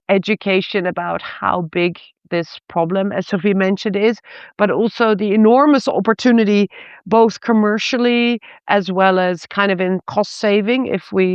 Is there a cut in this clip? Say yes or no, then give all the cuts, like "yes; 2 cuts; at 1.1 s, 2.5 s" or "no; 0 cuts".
no; 0 cuts